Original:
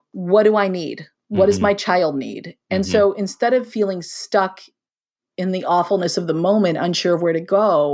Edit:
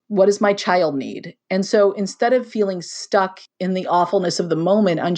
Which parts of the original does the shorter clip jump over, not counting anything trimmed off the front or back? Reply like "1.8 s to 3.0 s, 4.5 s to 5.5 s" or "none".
4.7 s to 5.2 s